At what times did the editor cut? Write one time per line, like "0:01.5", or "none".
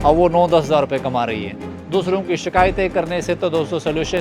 0:01.7